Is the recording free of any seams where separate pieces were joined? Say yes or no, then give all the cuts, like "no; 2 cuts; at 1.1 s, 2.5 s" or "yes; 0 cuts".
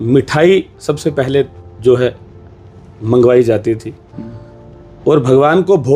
yes; 0 cuts